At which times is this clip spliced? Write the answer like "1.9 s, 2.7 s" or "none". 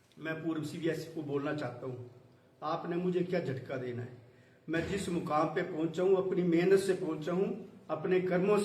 6.5 s